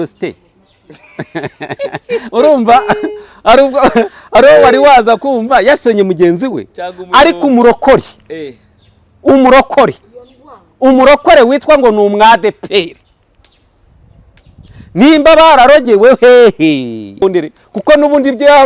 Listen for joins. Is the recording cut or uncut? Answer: cut